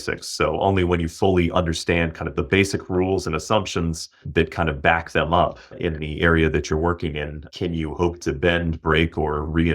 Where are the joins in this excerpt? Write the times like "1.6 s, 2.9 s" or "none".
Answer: 4.2 s, 5.8 s, 7.4 s